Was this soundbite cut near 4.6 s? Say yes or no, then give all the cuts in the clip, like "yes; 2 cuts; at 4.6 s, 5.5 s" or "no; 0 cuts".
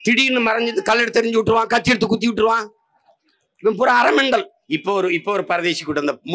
yes; 1 cut; at 4.6 s